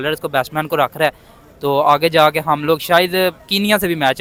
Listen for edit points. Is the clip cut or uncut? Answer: uncut